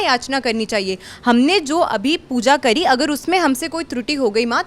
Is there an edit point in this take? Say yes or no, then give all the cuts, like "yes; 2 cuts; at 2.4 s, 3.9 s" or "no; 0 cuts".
no; 0 cuts